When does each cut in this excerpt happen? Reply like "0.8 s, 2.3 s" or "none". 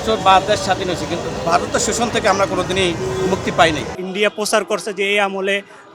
3.9 s